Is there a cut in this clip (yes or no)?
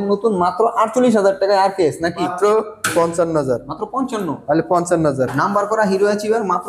yes